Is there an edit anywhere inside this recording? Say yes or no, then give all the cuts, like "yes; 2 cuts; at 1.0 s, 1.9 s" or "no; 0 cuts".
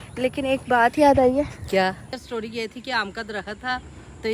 yes; 1 cut; at 2.0 s